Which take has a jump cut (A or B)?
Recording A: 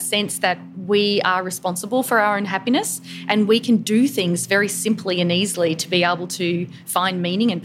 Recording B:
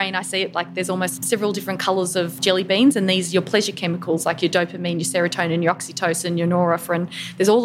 B